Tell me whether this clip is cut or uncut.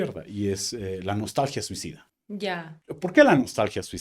cut